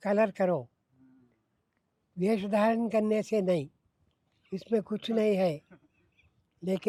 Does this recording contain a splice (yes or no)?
no